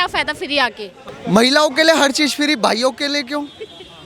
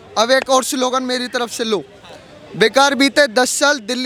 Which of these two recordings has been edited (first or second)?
first